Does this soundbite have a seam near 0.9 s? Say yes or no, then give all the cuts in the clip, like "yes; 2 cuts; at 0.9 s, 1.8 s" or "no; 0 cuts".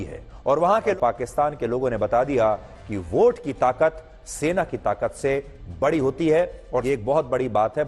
yes; 2 cuts; at 0.9 s, 6.8 s